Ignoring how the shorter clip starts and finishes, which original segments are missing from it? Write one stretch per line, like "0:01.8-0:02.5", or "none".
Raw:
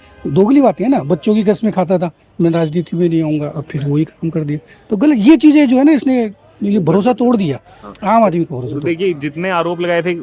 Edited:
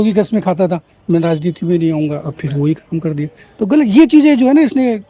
none